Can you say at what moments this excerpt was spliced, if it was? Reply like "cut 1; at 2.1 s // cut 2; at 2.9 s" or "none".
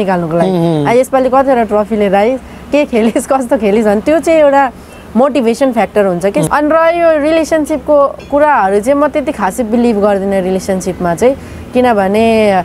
cut 1; at 6.5 s